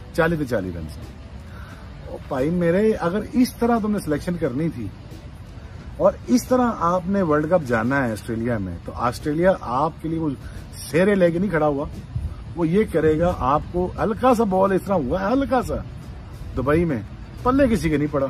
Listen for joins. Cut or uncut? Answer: uncut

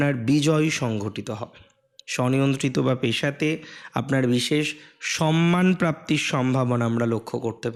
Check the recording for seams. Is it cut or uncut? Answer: uncut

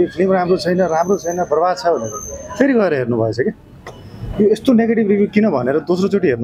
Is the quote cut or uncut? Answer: uncut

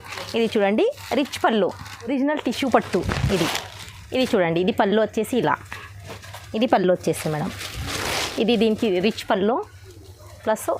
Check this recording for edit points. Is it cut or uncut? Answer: cut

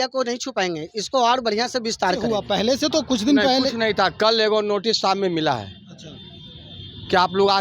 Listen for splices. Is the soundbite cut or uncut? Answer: cut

